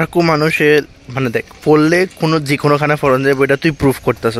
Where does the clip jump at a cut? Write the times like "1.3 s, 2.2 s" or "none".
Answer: none